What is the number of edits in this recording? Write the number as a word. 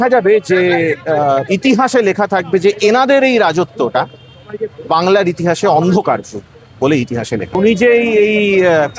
one